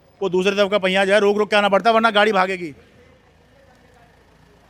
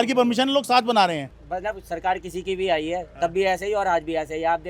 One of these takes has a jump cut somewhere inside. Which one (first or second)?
second